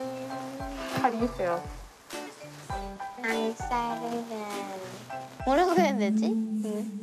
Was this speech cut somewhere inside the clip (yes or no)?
no